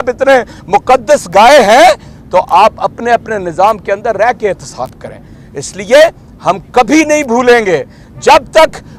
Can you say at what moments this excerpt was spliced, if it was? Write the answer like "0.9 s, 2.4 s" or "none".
none

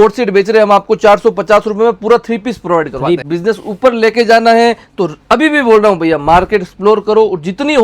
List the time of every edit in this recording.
3.2 s

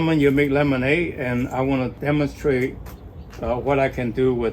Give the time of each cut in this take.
2.0 s

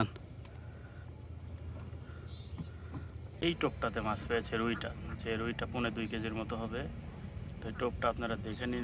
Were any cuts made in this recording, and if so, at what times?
3.4 s

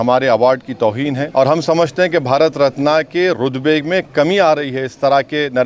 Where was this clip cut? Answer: 1.2 s

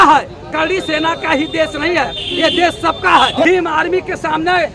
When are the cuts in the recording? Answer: 3.4 s

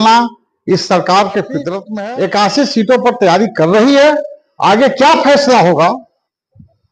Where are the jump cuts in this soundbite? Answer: 1.8 s

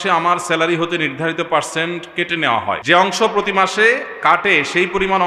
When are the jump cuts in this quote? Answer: 2.8 s

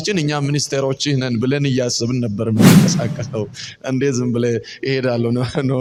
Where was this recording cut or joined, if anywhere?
none

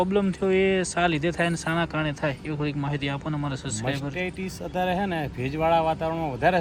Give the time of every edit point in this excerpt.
none

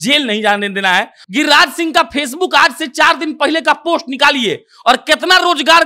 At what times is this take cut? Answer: 1.2 s

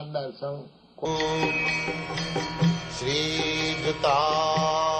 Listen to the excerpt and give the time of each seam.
none

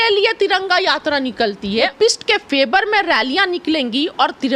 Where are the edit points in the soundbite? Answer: 1.9 s

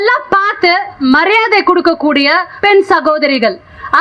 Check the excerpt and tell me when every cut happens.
1.0 s, 2.5 s

